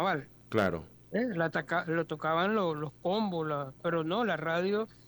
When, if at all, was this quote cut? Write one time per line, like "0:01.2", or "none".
0:00.9